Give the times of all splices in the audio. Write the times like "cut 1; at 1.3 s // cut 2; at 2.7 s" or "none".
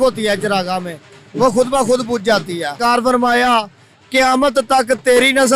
cut 1; at 2.8 s